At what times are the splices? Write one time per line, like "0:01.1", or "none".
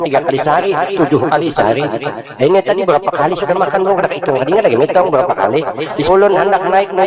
0:05.9